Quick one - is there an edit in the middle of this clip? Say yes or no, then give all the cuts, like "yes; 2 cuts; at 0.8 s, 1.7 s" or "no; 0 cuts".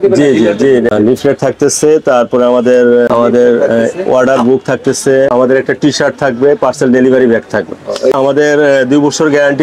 yes; 4 cuts; at 0.9 s, 3.1 s, 5.3 s, 8.1 s